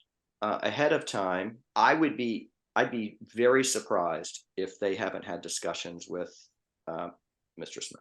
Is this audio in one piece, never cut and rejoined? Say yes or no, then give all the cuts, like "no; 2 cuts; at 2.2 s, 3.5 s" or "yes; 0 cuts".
no; 1 cut; at 1.6 s